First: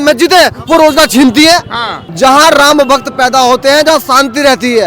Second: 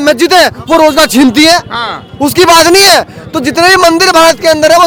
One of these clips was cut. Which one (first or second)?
first